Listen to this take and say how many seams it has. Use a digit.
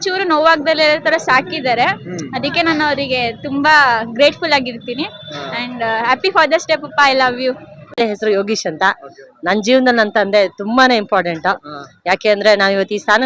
1